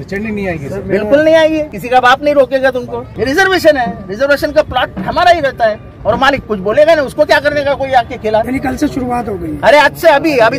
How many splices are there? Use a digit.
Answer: 3